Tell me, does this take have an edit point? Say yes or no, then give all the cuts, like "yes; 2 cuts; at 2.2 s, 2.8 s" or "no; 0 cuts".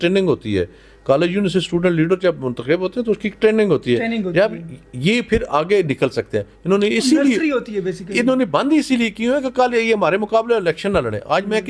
no; 0 cuts